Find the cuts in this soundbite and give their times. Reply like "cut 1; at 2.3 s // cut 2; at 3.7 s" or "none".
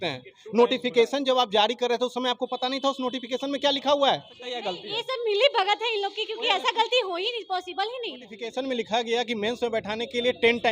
cut 1; at 4.7 s // cut 2; at 8.4 s